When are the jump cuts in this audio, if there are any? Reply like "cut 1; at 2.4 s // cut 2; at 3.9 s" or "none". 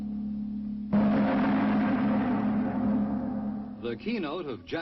cut 1; at 1.3 s

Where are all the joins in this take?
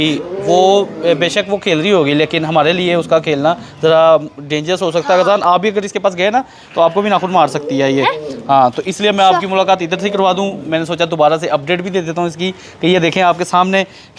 none

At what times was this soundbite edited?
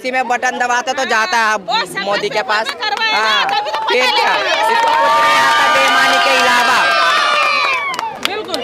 none

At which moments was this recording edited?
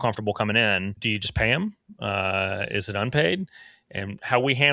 cut 1; at 1.0 s

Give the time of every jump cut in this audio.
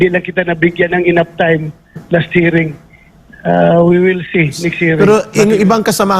cut 1; at 5.0 s

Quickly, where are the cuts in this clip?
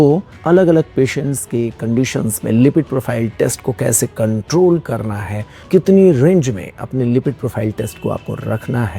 none

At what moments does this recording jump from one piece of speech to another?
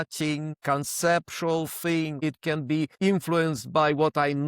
cut 1; at 2.2 s

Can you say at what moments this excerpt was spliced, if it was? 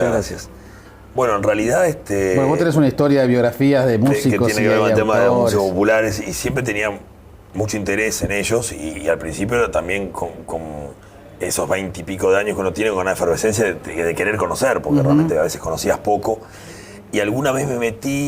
cut 1; at 4.2 s

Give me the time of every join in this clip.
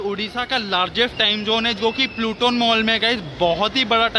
none

